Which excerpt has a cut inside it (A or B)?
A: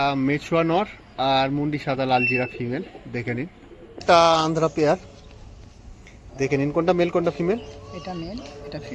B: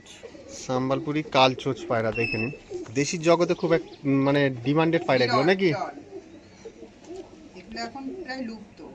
A